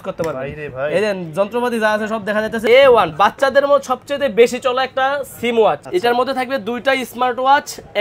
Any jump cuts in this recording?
yes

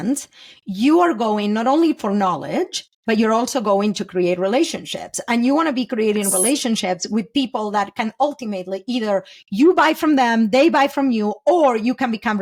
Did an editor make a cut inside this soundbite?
no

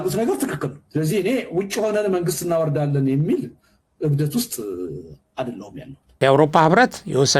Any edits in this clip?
yes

